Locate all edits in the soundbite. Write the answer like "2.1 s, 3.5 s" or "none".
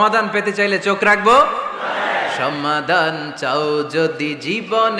none